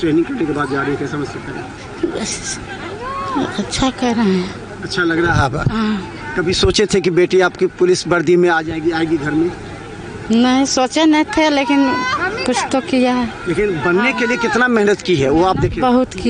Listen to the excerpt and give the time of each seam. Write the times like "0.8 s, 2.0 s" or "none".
none